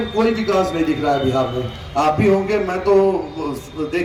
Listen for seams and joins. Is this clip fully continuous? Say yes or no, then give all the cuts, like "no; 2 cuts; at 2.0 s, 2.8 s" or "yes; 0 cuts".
yes; 0 cuts